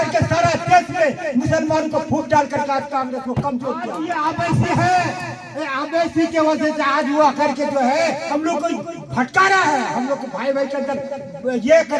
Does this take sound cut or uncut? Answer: cut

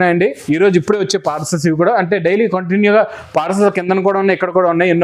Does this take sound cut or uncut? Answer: uncut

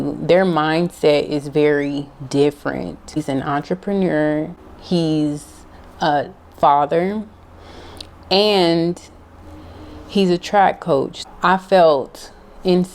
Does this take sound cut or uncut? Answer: cut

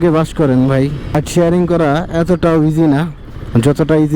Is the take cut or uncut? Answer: cut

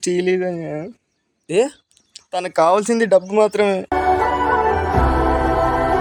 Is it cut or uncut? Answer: uncut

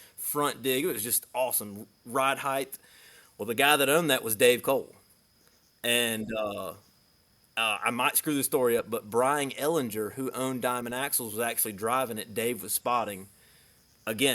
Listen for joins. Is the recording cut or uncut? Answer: uncut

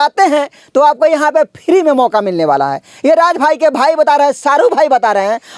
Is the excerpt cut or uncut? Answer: uncut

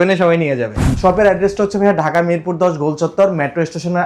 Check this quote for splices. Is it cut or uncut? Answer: cut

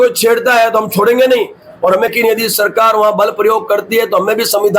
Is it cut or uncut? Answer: cut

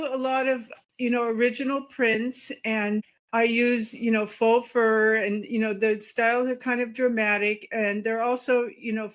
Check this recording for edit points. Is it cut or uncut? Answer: cut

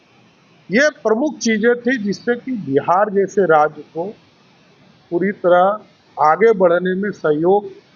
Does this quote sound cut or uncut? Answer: uncut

